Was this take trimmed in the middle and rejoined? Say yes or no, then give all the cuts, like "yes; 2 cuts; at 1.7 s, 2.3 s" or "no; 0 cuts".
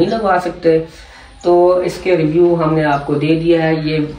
no; 0 cuts